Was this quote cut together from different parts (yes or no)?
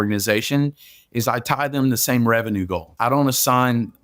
yes